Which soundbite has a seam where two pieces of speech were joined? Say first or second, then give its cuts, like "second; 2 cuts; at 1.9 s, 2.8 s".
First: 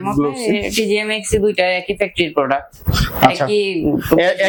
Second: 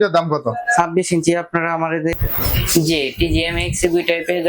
second; 1 cut; at 2.1 s